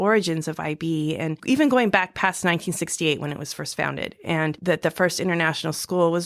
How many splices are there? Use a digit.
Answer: 2